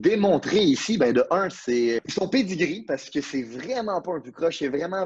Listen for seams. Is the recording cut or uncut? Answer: cut